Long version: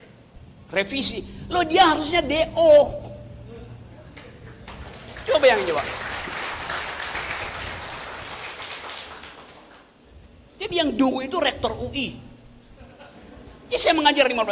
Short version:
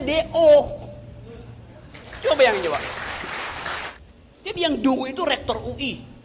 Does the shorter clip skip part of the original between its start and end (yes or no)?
yes